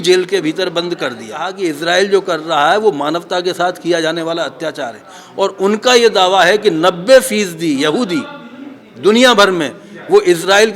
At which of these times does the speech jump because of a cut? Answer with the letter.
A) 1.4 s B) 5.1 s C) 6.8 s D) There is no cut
A